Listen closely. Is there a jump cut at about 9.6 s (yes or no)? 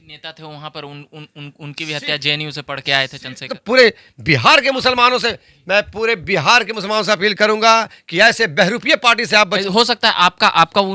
yes